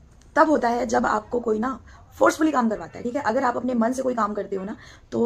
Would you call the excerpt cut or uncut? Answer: uncut